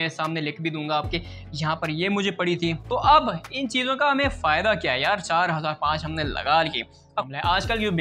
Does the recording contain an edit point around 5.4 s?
no; 2 cuts; at 2.8 s, 7.3 s

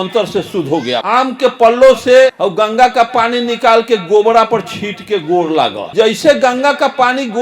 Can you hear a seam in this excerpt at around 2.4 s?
yes; 3 cuts; at 1.0 s, 2.4 s, 5.9 s

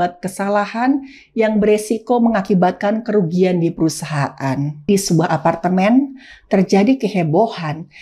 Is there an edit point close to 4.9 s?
yes; 1 cut; at 4.9 s

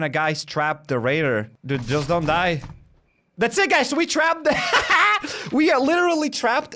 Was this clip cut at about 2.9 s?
no; 1 cut; at 1.5 s

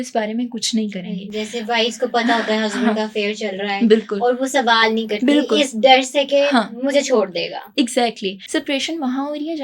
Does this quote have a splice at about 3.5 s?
no; 1 cut; at 8.4 s

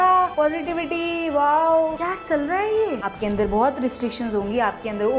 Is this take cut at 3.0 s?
yes; 2 cuts; at 2.0 s, 3.0 s

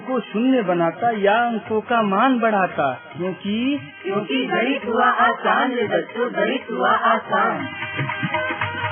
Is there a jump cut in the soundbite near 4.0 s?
no; 0 cuts

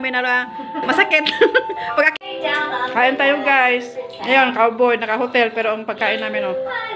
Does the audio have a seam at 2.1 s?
yes; 1 cut; at 2.1 s

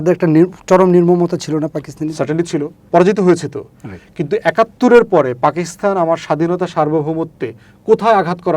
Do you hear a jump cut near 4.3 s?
no; 1 cut; at 2.8 s

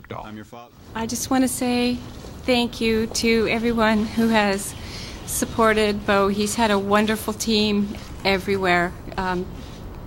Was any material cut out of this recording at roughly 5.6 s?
yes; 1 cut; at 5.6 s

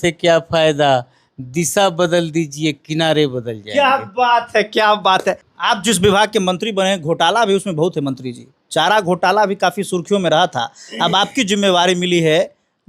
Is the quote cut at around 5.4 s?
yes; 1 cut; at 5.4 s

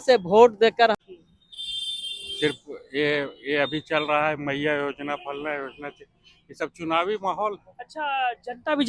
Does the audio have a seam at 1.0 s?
yes; 1 cut; at 1.0 s

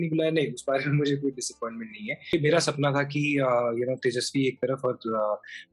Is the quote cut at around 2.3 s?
yes; 1 cut; at 2.3 s

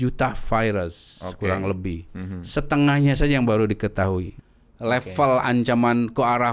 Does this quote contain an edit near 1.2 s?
no; 1 cut; at 4.3 s

